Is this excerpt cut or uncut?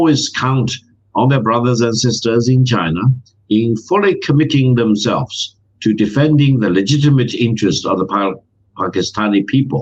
uncut